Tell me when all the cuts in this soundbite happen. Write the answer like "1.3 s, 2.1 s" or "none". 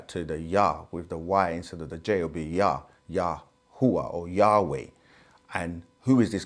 none